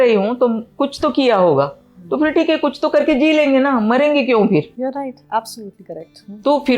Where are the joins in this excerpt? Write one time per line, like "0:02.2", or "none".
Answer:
none